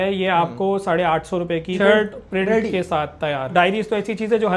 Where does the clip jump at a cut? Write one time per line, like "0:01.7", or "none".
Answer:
0:01.8
0:03.5